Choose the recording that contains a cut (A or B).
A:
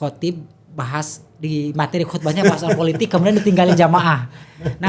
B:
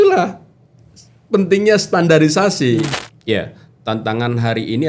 B